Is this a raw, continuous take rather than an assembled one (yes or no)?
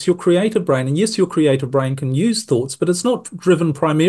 yes